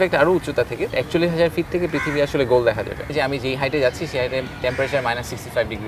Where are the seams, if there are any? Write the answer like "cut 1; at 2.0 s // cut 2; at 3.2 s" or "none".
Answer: cut 1; at 0.9 s // cut 2; at 3.1 s